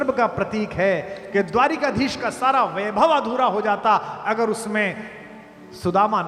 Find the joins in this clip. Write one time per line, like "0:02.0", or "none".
none